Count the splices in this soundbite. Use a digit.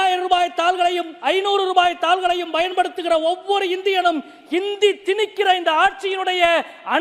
0